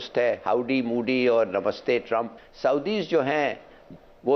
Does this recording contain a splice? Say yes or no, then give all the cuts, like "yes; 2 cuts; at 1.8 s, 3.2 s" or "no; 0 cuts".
yes; 1 cut; at 2.4 s